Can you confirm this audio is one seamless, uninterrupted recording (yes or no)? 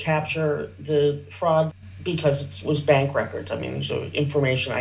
no